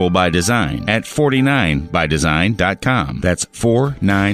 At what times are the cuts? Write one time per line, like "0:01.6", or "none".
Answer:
none